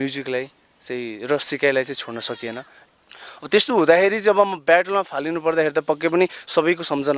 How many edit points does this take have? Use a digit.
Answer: 1